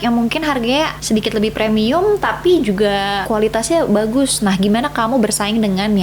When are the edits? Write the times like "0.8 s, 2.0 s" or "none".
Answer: 1.0 s, 3.2 s